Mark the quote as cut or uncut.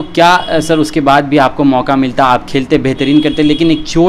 uncut